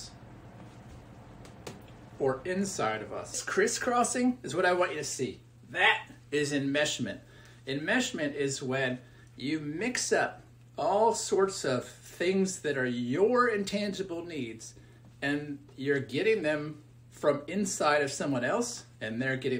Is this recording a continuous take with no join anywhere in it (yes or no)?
no